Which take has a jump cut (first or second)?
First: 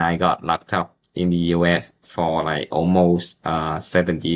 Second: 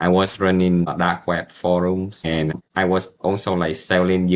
second